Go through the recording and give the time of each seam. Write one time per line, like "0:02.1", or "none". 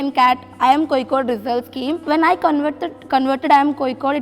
0:02.0